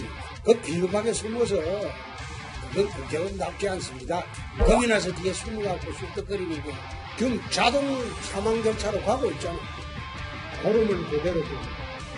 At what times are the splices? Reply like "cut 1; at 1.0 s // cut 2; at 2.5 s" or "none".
none